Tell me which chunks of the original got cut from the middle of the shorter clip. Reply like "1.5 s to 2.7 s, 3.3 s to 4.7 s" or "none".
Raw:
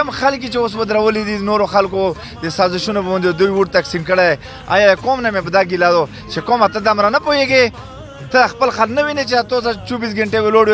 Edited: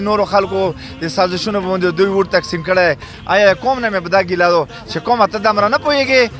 none